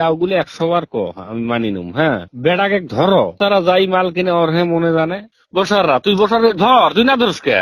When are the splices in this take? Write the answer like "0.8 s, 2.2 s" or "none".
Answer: 5.2 s